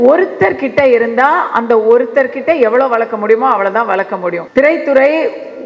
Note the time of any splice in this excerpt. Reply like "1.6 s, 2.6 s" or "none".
4.4 s